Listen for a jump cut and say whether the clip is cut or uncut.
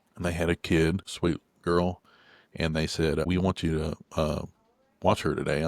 cut